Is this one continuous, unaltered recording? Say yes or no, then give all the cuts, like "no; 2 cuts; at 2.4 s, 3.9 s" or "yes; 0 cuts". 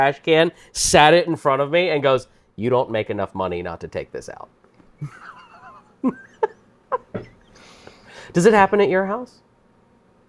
yes; 0 cuts